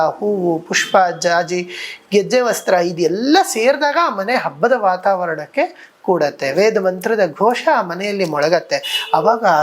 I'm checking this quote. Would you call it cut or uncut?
uncut